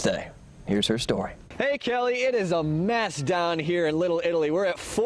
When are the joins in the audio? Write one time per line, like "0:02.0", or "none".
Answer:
0:01.4

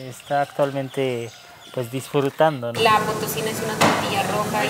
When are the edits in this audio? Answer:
0:02.7

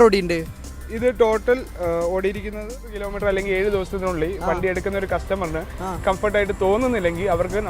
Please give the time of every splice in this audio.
0:03.1

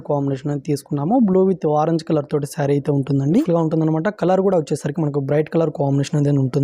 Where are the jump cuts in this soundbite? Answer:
0:03.3

